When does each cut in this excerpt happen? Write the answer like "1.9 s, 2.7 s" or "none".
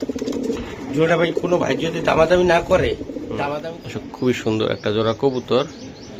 3.5 s